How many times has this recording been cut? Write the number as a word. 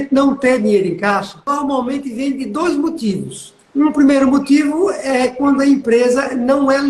one